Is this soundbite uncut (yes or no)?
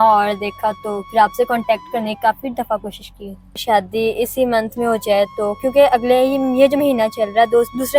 no